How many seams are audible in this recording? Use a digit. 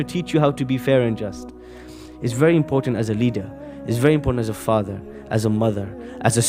0